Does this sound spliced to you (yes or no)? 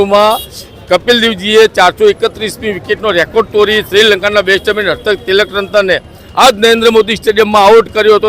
no